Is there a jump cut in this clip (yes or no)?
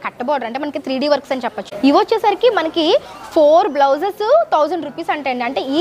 yes